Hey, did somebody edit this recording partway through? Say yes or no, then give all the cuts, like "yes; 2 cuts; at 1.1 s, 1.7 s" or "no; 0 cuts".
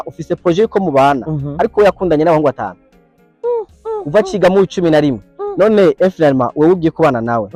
no; 0 cuts